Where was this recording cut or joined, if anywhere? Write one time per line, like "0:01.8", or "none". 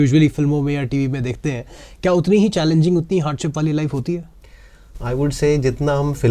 none

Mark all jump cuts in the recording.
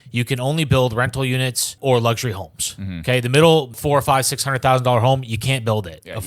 0:01.7
0:03.8

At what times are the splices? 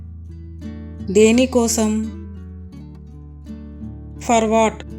none

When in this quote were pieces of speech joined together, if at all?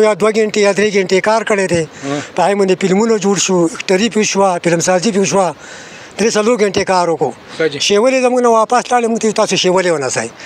none

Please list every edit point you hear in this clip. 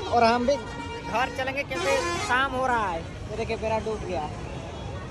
none

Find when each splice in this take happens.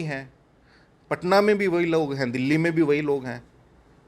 none

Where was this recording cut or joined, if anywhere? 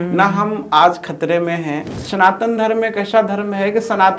0:01.9

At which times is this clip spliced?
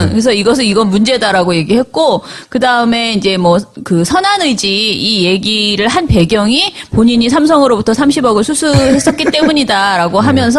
none

